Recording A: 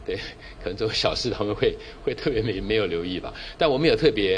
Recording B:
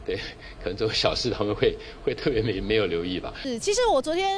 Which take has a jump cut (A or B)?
B